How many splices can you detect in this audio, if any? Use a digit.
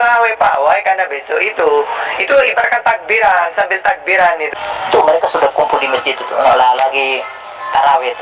1